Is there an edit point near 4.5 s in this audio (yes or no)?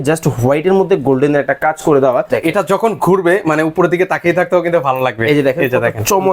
no